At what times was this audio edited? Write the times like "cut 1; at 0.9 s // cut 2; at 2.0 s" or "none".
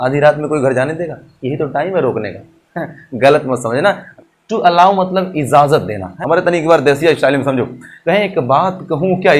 cut 1; at 4.1 s // cut 2; at 6.1 s